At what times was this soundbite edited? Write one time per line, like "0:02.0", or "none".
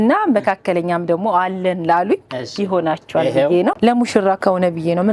0:03.8